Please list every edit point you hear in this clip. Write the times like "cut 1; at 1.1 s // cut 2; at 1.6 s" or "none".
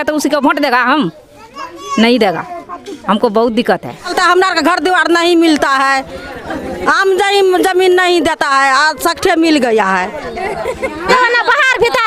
cut 1; at 4.1 s // cut 2; at 11.1 s